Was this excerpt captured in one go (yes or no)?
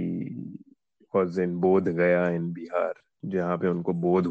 no